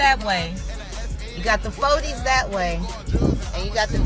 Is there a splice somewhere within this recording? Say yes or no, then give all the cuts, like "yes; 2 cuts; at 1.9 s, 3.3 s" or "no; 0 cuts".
no; 0 cuts